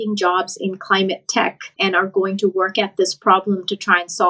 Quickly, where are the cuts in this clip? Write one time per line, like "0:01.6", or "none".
0:01.6